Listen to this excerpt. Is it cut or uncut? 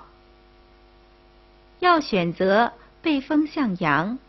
uncut